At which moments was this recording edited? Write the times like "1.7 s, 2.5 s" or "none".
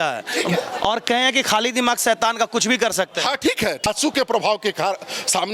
3.9 s